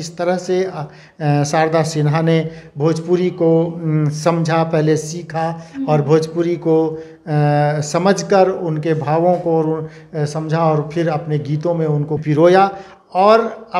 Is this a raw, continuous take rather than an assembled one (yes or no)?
no